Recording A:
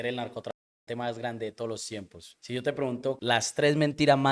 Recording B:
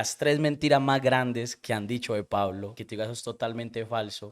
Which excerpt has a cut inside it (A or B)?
A